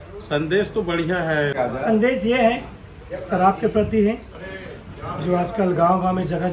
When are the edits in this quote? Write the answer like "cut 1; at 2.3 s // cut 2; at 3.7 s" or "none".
cut 1; at 1.5 s